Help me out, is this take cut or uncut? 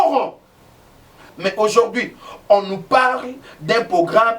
cut